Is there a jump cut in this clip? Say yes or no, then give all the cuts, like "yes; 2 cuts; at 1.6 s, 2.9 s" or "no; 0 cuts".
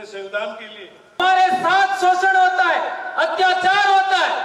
yes; 1 cut; at 1.2 s